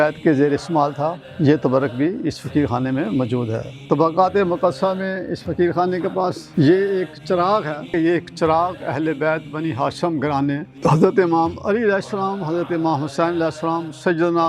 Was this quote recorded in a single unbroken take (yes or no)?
no